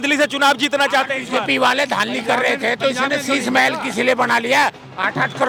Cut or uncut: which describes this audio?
uncut